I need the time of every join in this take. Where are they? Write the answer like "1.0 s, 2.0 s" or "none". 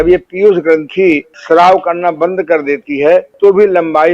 1.3 s, 3.3 s